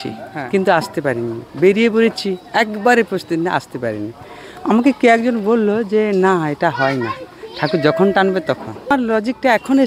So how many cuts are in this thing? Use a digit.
1